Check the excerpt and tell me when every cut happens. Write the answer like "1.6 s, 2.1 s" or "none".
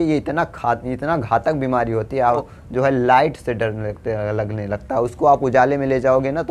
2.4 s